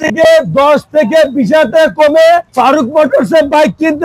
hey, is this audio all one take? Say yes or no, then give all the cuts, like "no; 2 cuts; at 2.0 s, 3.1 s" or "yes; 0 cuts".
yes; 0 cuts